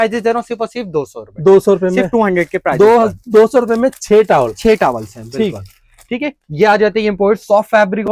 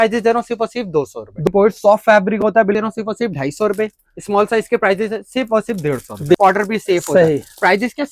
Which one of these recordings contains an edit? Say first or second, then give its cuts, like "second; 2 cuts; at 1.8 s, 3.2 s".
second; 3 cuts; at 1.5 s, 2.8 s, 6.3 s